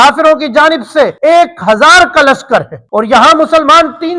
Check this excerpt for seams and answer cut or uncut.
cut